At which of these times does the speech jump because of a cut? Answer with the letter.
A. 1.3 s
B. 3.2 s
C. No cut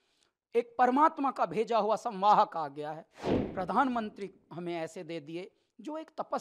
B